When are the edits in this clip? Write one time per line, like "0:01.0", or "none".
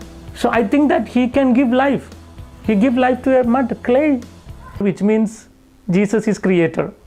0:04.8